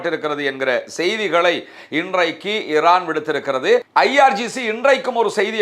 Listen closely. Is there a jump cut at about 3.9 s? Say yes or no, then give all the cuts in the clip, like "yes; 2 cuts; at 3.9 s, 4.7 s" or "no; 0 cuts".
yes; 1 cut; at 3.9 s